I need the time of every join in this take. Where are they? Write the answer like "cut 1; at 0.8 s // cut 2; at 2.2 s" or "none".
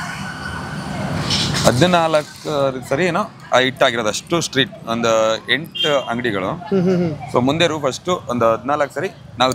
none